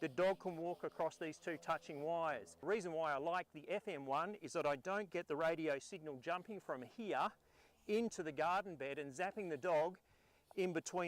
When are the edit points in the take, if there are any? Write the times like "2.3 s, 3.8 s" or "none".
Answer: 2.6 s